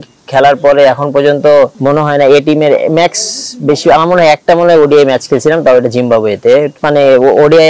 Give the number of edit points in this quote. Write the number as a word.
two